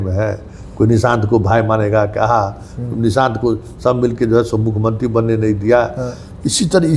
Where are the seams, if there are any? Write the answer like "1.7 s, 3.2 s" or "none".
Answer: none